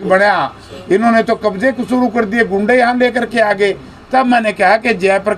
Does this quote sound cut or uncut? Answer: uncut